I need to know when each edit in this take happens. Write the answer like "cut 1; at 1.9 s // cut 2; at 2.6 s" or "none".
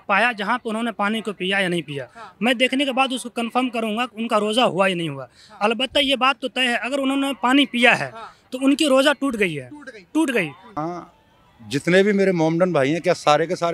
cut 1; at 10.8 s